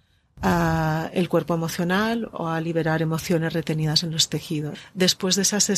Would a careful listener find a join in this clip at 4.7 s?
yes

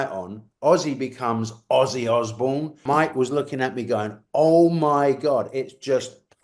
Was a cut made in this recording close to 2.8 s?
yes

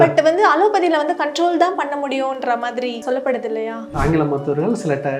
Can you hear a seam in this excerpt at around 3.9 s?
yes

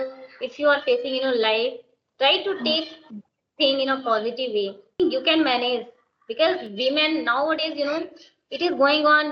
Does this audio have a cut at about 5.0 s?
yes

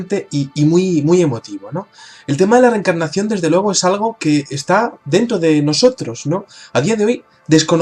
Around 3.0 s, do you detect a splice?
yes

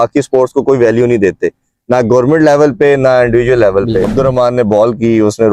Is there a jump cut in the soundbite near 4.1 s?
yes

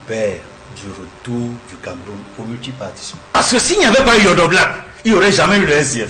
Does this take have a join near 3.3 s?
yes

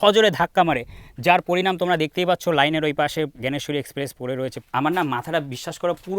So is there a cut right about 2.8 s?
no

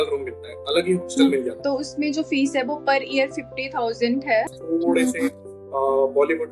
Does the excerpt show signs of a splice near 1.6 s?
yes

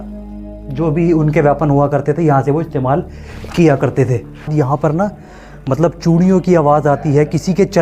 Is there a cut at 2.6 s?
no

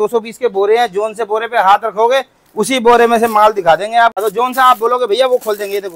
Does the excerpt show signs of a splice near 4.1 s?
yes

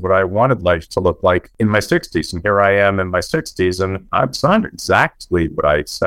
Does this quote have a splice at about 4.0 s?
yes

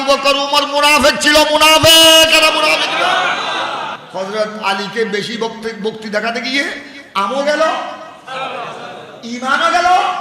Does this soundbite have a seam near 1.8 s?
no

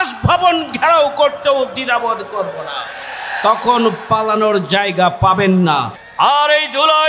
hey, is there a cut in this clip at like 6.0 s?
yes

